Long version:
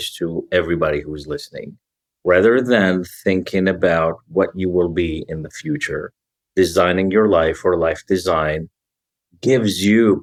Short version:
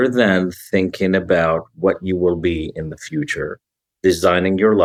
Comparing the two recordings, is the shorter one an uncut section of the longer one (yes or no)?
yes